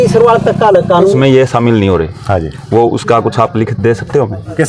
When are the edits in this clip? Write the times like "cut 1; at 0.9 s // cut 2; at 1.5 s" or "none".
cut 1; at 1.1 s